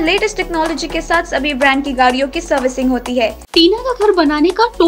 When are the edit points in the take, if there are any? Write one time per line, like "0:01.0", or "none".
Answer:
0:03.4